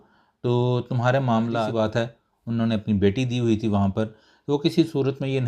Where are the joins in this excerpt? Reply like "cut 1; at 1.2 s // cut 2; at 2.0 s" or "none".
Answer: cut 1; at 1.6 s